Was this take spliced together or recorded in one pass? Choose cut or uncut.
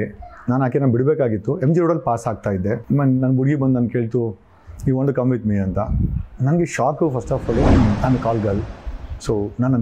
cut